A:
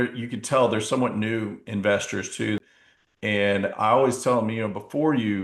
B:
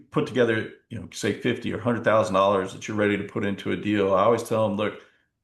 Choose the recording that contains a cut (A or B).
A